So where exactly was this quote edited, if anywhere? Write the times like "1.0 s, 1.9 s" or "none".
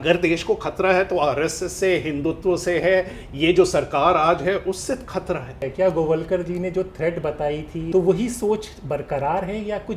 5.6 s, 7.9 s